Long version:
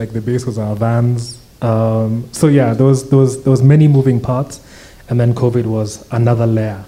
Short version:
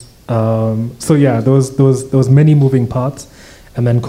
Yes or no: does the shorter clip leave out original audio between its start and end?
no